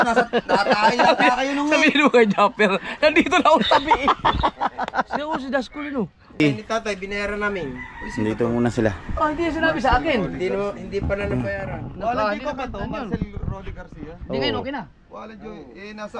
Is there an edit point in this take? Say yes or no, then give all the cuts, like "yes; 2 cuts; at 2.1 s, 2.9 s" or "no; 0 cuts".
yes; 1 cut; at 6.4 s